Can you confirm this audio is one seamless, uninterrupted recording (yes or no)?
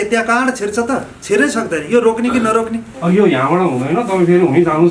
no